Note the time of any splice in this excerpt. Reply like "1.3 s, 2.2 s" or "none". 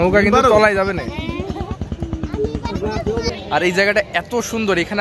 3.4 s

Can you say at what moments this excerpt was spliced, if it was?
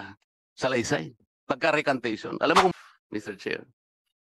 2.7 s

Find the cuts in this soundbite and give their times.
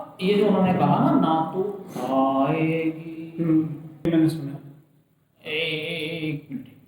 4.1 s

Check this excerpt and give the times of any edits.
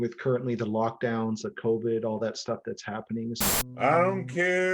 3.4 s

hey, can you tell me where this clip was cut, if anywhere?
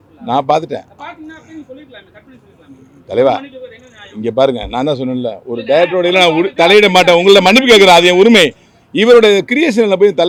none

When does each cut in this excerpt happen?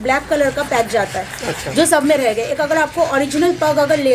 none

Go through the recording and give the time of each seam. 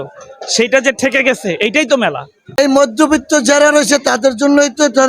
2.4 s

